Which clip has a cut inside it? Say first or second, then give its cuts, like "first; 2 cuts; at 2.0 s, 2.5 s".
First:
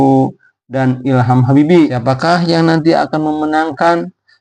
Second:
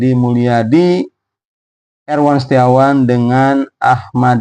first; 1 cut; at 2.0 s